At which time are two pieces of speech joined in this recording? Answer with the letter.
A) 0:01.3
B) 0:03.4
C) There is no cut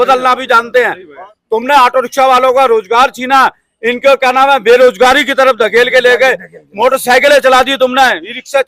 A